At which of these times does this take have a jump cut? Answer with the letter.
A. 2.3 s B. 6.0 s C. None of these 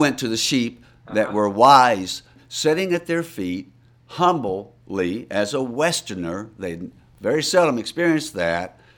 A